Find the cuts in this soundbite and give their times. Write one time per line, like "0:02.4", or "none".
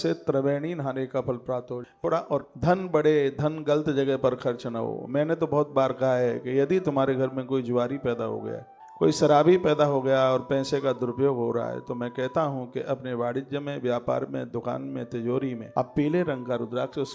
0:02.0